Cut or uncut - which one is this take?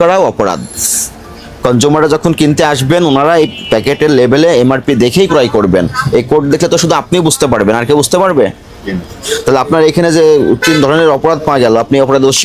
uncut